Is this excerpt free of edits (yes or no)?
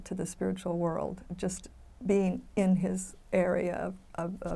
yes